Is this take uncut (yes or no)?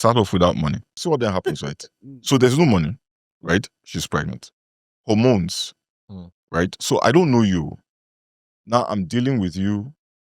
no